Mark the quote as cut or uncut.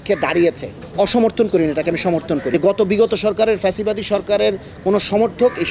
cut